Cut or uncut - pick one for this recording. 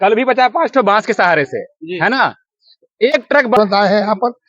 cut